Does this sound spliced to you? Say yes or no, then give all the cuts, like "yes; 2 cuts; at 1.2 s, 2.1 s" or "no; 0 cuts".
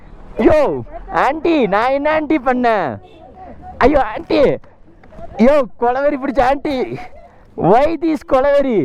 no; 0 cuts